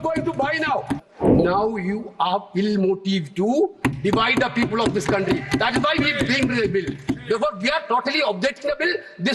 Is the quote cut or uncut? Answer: cut